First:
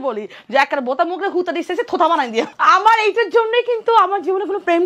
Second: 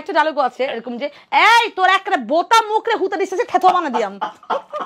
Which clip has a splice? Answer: first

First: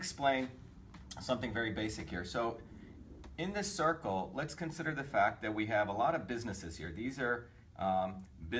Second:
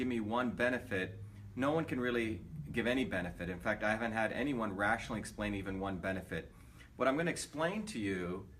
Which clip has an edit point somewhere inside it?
second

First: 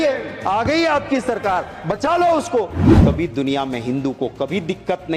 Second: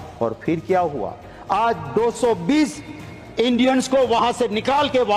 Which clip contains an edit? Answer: first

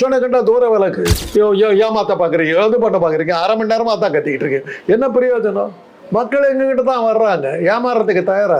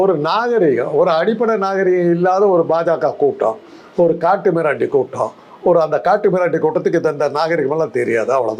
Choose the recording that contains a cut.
first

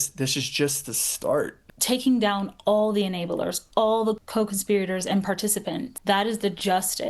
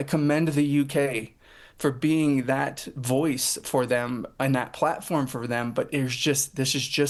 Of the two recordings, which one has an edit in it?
first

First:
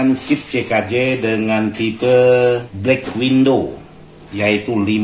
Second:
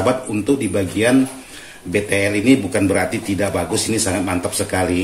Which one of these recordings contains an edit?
first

